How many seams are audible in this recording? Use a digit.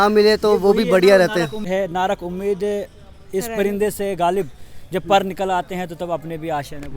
1